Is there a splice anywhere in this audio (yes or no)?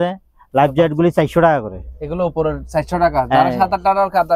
no